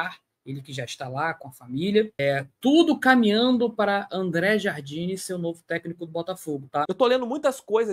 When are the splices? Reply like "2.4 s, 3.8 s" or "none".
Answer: 2.1 s, 6.9 s